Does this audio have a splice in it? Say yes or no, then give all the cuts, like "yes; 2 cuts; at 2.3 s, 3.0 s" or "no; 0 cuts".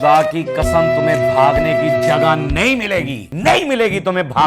yes; 1 cut; at 3.2 s